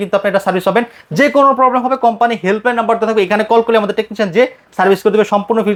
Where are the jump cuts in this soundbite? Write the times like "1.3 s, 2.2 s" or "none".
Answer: none